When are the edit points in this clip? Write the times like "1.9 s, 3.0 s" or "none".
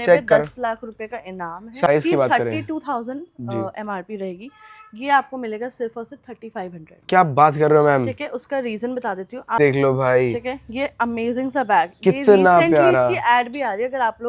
1.9 s, 9.6 s